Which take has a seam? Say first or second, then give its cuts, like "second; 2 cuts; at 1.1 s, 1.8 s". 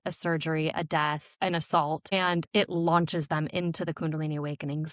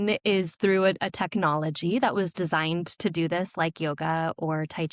first; 2 cuts; at 1.3 s, 2.1 s